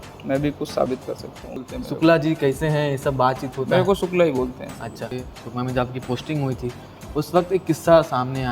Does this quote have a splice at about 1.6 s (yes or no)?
yes